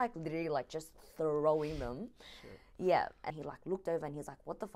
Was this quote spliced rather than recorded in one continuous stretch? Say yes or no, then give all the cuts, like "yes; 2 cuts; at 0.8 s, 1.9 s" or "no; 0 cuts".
yes; 1 cut; at 3.3 s